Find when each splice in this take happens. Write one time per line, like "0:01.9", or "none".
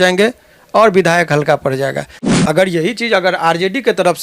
0:02.1